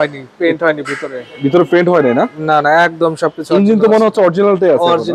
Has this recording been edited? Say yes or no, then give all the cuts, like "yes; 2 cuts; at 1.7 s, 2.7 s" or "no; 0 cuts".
no; 0 cuts